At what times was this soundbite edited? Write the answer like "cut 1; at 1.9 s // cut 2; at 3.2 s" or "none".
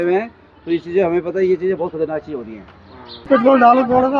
cut 1; at 3.3 s